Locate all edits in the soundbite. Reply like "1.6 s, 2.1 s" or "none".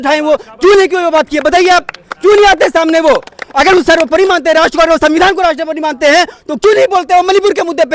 2.0 s